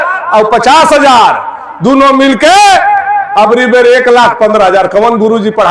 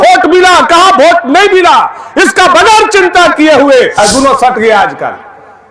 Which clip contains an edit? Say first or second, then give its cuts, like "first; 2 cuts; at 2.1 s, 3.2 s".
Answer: second; 1 cut; at 4.0 s